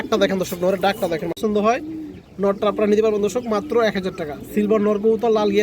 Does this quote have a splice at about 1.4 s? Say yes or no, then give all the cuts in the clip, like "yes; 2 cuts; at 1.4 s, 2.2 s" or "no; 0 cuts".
yes; 1 cut; at 1.4 s